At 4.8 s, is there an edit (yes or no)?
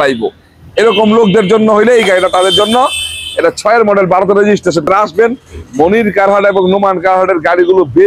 yes